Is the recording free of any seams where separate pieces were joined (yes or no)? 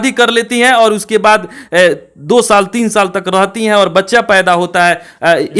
yes